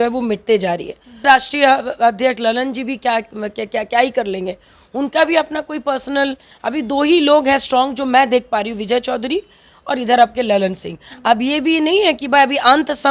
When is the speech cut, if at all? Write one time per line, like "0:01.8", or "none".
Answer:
0:01.2